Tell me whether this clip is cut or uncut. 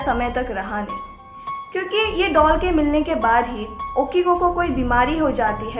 uncut